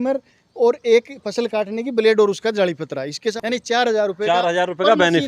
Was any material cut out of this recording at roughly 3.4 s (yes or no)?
yes